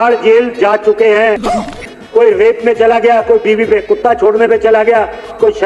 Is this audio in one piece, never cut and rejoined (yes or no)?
no